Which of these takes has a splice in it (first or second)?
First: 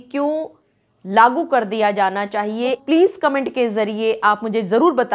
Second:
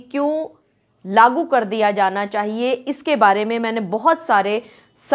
first